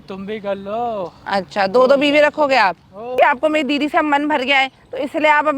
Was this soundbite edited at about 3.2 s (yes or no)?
yes